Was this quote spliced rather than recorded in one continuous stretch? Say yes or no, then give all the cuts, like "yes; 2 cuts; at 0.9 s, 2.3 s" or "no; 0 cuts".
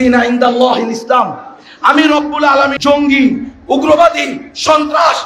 yes; 1 cut; at 2.8 s